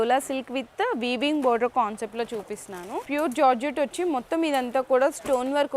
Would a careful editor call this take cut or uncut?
cut